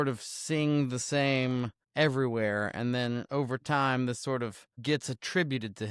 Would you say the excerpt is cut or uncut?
cut